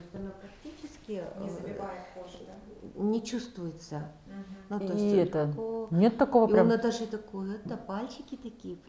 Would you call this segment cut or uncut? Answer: uncut